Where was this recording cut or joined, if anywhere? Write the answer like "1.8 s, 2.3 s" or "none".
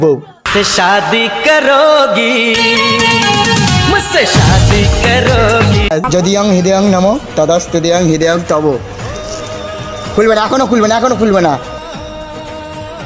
6.1 s, 11.7 s

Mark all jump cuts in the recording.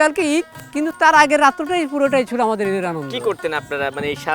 none

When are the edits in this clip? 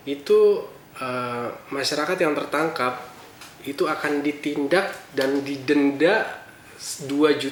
none

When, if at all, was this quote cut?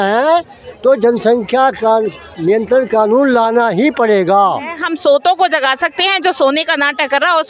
4.8 s

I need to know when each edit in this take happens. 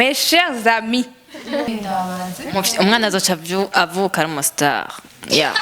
1.7 s

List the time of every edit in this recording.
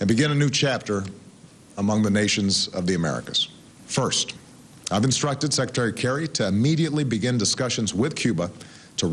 none

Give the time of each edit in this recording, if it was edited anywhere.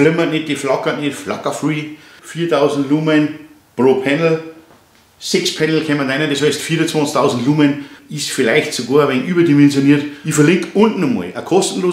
2.0 s, 7.9 s, 10.2 s

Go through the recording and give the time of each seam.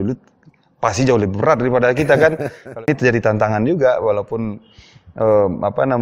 2.8 s

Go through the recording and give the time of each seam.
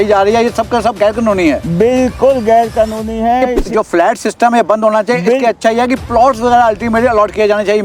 3.6 s

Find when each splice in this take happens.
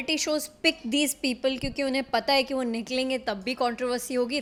none

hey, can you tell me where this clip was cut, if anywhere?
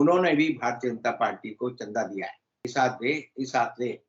2.7 s

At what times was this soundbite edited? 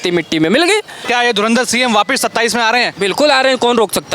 1.0 s

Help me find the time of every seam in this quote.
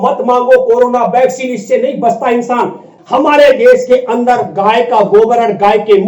2.9 s

